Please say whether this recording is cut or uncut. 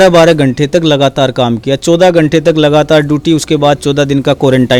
uncut